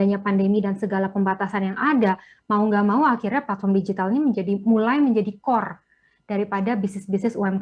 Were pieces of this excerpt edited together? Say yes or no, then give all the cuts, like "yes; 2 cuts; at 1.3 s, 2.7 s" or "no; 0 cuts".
no; 0 cuts